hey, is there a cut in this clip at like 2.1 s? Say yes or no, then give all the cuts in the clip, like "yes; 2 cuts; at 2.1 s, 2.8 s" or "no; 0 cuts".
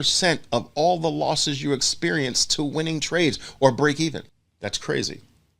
no; 1 cut; at 4.4 s